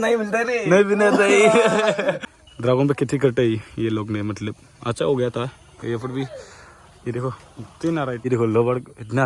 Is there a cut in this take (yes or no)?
yes